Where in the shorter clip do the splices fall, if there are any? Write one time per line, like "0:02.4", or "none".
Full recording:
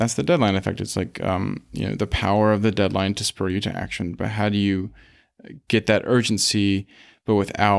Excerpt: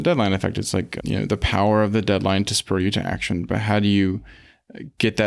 0:00.9